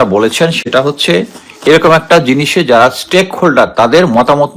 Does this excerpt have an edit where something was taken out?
no; 0 cuts

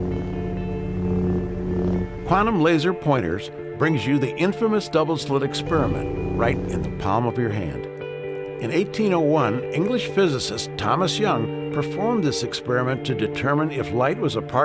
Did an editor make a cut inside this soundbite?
no; 0 cuts

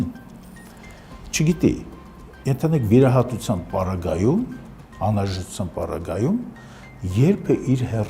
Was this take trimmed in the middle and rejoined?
no; 0 cuts

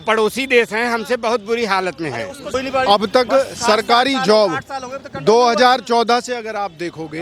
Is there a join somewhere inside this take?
yes; 1 cut; at 2.5 s

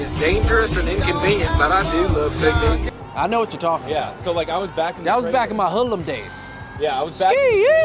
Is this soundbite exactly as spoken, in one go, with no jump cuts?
yes; 0 cuts

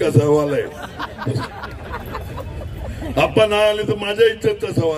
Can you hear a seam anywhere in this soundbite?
no; 0 cuts

